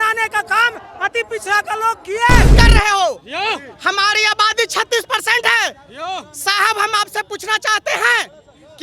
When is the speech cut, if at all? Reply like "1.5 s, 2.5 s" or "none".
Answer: 2.5 s